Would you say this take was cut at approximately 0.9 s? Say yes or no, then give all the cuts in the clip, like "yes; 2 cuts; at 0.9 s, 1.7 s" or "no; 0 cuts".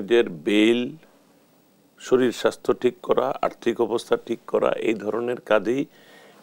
no; 0 cuts